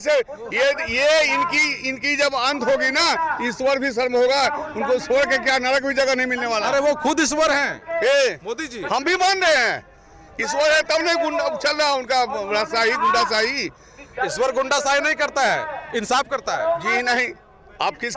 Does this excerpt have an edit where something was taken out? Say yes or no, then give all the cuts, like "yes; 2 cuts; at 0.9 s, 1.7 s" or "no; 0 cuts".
no; 0 cuts